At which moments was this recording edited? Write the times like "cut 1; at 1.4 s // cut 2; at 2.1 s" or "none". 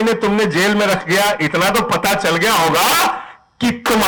none